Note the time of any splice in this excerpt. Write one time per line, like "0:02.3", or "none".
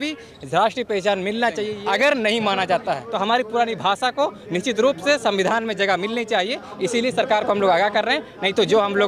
0:01.7
0:03.1